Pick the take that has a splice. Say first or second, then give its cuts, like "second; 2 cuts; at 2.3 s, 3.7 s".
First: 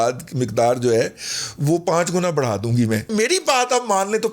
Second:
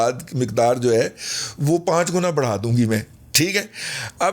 first; 1 cut; at 3.1 s